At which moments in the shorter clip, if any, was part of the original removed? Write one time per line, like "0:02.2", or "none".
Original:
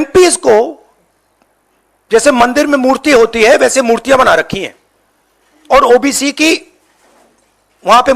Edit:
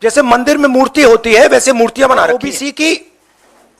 0:02.4

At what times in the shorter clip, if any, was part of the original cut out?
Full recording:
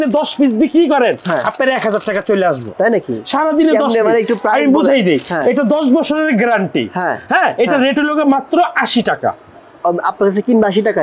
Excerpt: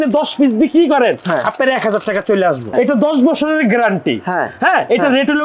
0:02.6

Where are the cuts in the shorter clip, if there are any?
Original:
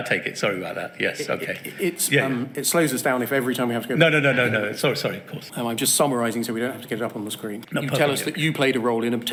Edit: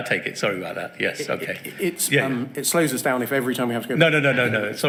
none

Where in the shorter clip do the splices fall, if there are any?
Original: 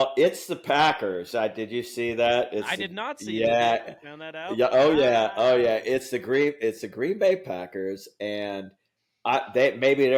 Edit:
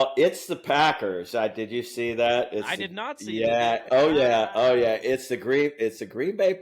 0:03.9

